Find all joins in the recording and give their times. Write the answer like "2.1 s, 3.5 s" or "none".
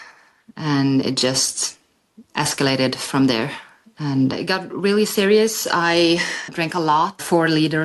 none